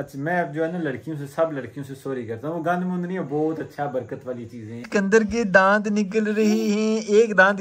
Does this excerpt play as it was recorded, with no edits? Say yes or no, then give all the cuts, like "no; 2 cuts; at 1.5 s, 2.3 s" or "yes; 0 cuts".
no; 1 cut; at 4.8 s